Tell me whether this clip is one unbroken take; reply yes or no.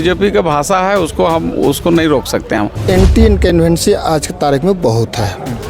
no